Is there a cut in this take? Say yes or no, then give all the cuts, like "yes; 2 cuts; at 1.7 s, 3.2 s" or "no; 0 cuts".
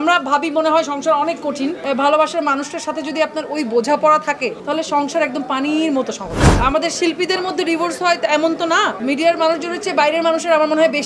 yes; 4 cuts; at 1.8 s, 4.6 s, 6.5 s, 9.0 s